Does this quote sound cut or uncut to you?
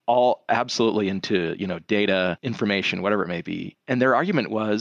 cut